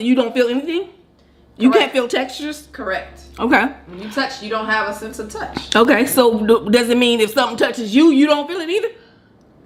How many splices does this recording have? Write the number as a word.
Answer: zero